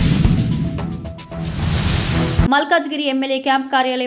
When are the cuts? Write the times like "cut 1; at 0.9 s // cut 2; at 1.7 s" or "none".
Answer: cut 1; at 2.5 s